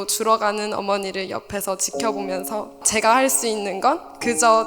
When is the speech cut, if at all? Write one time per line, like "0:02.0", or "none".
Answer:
0:02.9